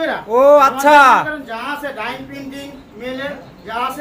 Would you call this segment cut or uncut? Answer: uncut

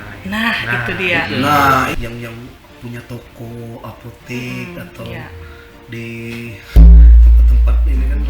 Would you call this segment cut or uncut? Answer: cut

